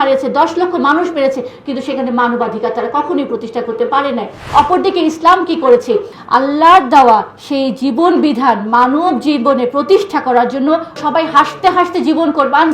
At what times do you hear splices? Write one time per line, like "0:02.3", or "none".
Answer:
0:04.4
0:06.1
0:11.0